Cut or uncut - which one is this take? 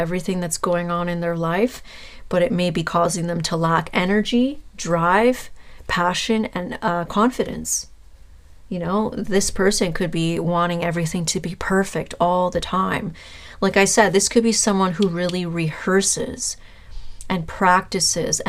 uncut